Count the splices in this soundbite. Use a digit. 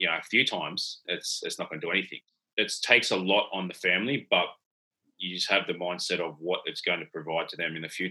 1